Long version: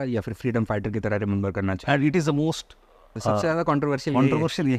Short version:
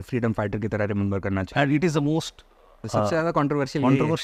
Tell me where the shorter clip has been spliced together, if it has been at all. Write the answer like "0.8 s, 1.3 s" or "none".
none